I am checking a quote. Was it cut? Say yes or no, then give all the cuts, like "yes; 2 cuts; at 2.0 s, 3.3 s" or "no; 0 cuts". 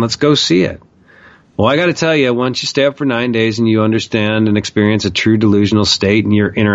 no; 0 cuts